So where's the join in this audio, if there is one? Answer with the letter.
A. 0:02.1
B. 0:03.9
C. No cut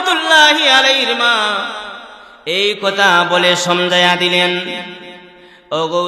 C